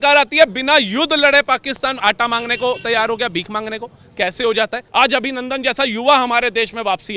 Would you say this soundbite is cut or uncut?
cut